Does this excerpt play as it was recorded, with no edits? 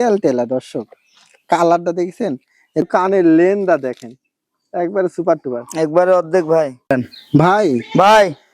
no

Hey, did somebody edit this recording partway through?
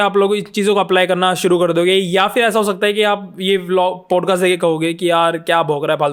no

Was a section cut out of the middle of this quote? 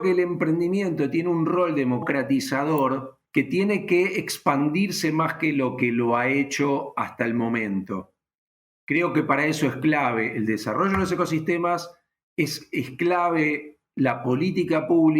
yes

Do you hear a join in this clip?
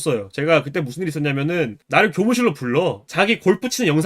yes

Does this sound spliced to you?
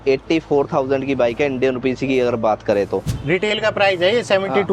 yes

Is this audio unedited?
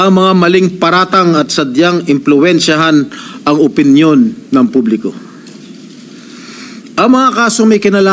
yes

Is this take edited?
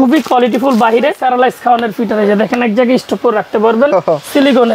yes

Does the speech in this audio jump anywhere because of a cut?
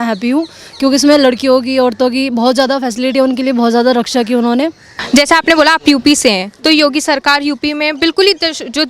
no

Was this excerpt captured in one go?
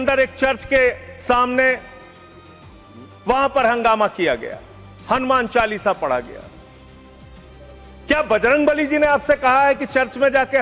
yes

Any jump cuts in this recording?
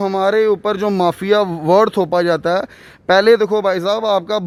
no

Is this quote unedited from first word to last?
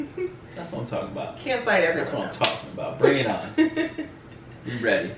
yes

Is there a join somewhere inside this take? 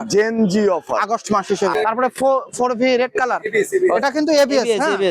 yes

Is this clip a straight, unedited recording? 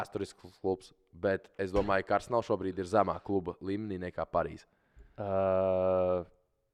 yes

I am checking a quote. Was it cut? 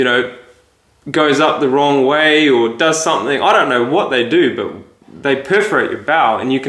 no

